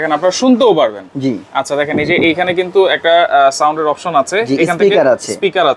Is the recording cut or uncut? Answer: uncut